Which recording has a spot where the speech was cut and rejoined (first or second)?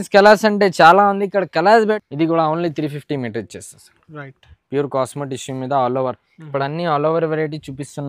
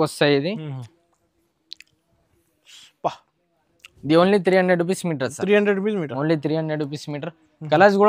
first